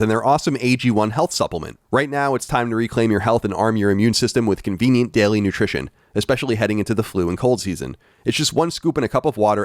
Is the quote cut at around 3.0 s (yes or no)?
no